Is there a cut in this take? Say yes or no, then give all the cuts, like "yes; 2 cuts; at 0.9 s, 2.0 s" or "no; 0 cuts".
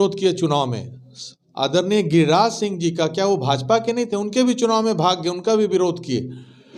no; 0 cuts